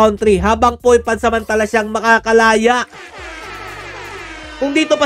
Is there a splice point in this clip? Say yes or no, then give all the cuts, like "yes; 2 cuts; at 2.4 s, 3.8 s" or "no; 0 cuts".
no; 0 cuts